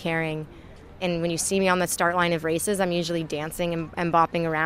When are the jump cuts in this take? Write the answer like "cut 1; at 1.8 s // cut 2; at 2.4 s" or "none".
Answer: cut 1; at 1.0 s